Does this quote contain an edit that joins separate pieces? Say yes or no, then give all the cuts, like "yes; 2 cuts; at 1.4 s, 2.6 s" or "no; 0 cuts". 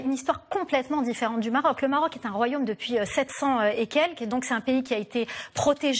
no; 0 cuts